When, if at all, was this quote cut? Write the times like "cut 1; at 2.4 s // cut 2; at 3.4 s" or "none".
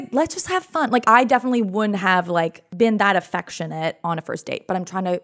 cut 1; at 1.0 s // cut 2; at 2.6 s // cut 3; at 4.0 s